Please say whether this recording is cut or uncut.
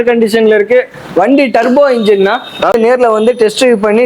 cut